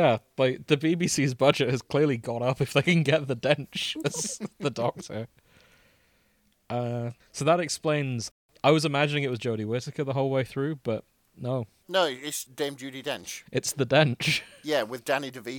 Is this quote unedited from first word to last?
no; 3 cuts; at 7.2 s, 8.3 s, 11.8 s

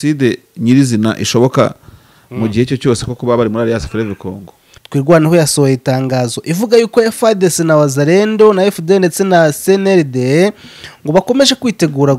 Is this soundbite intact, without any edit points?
no; 1 cut; at 4.5 s

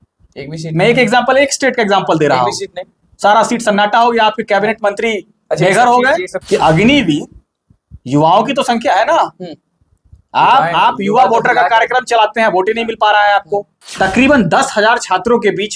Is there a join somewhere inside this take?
yes; 2 cuts; at 6.3 s, 13.8 s

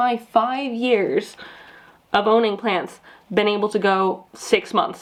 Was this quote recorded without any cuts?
yes; 0 cuts

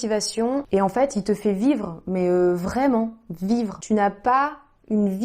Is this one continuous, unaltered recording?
no; 1 cut; at 3.8 s

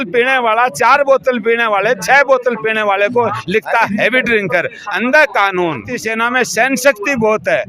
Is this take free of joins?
no; 1 cut; at 5.9 s

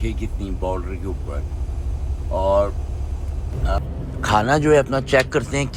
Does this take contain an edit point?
yes; 1 cut; at 3.8 s

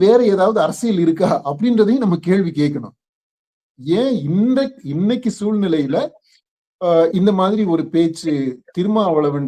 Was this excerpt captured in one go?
yes; 0 cuts

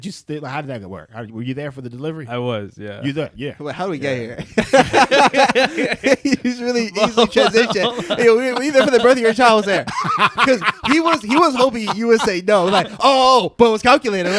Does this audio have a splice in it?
no; 0 cuts

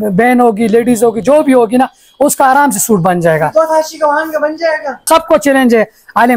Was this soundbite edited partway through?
yes; 1 cut; at 5.1 s

